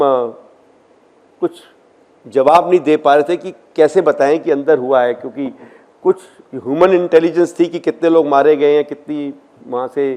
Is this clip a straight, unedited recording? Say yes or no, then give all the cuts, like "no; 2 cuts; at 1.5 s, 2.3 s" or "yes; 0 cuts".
yes; 0 cuts